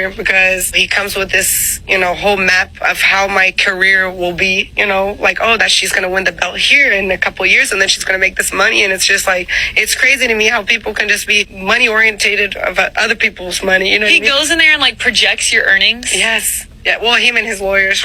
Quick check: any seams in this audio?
no; 0 cuts

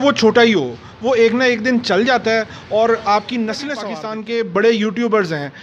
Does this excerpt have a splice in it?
yes; 1 cut; at 3.8 s

